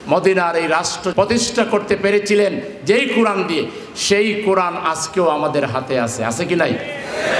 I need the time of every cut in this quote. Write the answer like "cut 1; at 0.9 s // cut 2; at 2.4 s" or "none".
cut 1; at 1.0 s